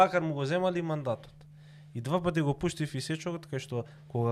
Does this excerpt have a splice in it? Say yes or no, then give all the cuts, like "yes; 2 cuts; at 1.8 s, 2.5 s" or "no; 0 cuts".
no; 0 cuts